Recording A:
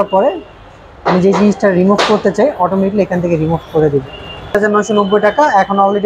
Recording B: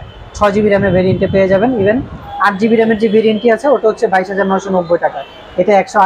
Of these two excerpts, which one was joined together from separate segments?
A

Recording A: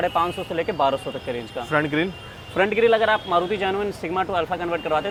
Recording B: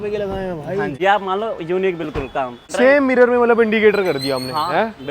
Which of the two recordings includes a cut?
B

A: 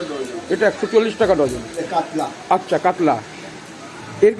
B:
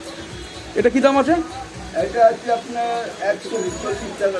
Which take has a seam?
A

